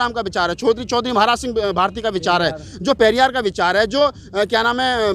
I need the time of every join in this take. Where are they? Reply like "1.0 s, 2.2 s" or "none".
none

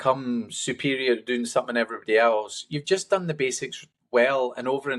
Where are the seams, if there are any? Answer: none

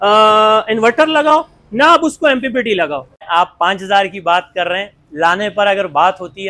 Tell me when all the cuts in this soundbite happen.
3.2 s

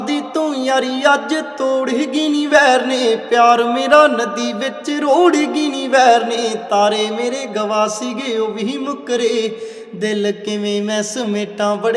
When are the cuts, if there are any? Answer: none

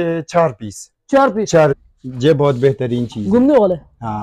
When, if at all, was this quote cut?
1.7 s

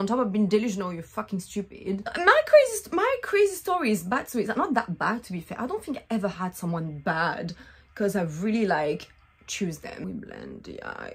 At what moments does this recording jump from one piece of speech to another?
none

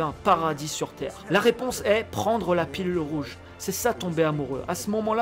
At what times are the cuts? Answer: 1.1 s

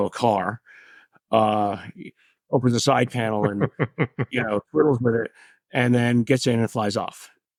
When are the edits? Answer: none

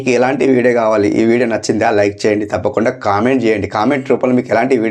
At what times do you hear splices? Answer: none

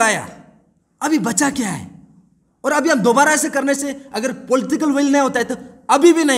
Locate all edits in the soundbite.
none

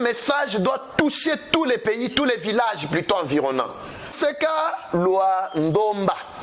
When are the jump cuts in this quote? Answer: 4.1 s

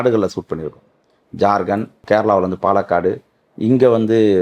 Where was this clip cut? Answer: 2.0 s

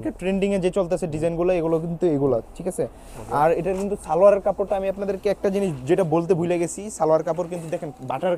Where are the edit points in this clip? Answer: none

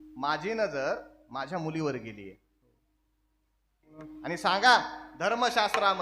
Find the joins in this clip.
4.0 s

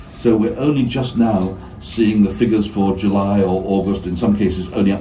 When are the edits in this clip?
none

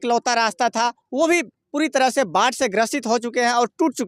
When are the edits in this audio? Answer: none

